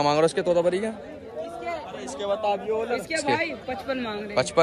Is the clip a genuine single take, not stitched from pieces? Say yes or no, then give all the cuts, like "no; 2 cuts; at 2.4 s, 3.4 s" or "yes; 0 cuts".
yes; 0 cuts